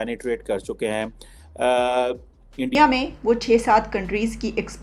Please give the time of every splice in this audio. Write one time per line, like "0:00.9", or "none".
0:02.7